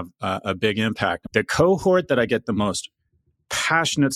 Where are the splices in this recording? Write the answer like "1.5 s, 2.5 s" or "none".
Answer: 1.2 s